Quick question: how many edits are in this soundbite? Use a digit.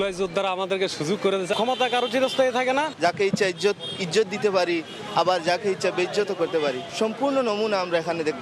3